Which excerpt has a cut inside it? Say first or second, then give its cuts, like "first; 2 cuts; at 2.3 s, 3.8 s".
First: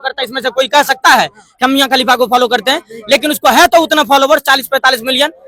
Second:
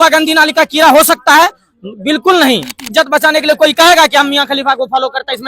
second; 1 cut; at 2.9 s